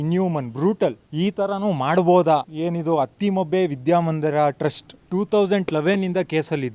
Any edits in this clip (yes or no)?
yes